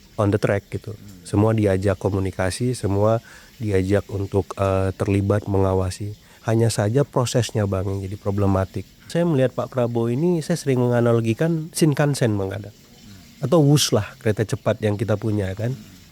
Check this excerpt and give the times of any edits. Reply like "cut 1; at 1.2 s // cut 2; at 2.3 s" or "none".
cut 1; at 9.1 s